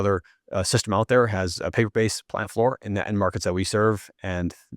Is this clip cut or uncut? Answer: cut